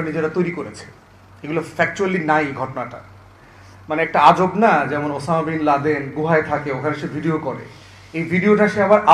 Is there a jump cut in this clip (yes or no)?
no